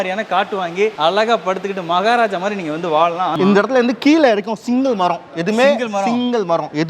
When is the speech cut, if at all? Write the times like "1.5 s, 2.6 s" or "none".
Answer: 0.9 s, 3.3 s